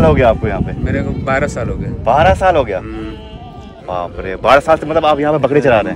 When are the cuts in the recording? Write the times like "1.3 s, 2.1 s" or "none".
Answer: none